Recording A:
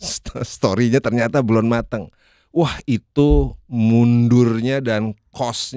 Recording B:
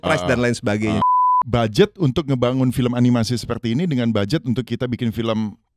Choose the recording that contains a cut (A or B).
B